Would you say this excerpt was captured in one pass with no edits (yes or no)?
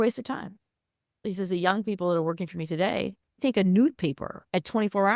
no